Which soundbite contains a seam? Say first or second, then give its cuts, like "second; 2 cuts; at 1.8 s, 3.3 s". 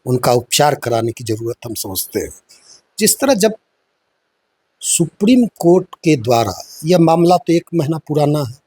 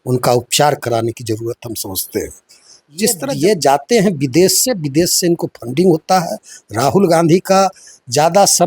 second; 1 cut; at 3.2 s